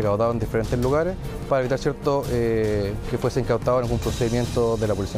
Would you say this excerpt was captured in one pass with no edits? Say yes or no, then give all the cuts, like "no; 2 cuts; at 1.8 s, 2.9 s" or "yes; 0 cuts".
yes; 0 cuts